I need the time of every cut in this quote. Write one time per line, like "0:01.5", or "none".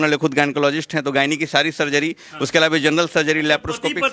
none